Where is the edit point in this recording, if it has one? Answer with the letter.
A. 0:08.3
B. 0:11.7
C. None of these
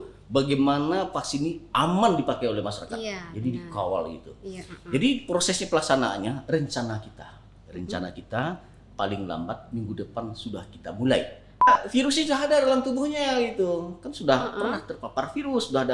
B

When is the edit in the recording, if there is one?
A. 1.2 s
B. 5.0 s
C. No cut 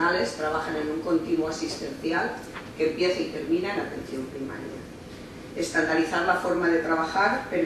A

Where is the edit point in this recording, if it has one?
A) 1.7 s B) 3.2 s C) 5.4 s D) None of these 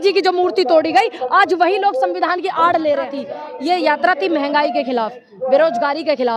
B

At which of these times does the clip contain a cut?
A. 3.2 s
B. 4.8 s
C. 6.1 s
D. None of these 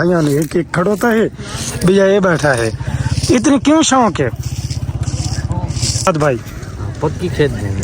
C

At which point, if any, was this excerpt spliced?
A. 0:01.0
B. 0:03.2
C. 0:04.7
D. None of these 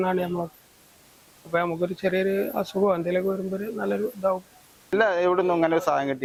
D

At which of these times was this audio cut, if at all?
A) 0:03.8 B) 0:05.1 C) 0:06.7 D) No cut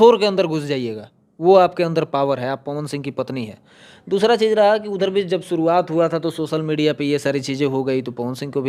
D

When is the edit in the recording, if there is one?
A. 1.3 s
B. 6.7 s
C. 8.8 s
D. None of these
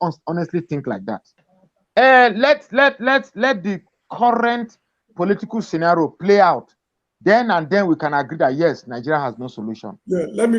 A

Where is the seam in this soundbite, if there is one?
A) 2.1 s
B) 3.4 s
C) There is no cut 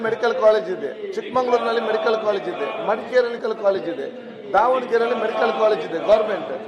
B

